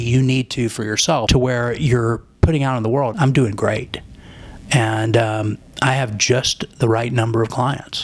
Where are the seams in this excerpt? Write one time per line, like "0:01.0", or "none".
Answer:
0:01.3
0:03.1